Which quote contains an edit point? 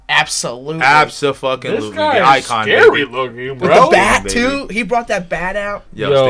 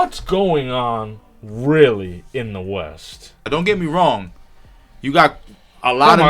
second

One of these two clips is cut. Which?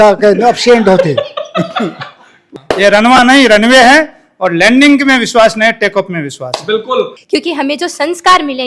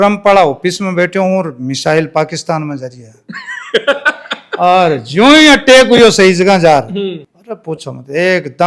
first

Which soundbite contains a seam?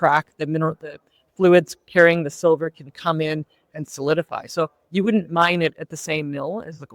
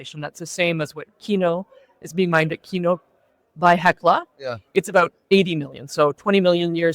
second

